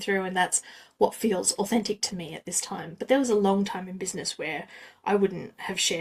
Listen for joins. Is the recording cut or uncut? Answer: uncut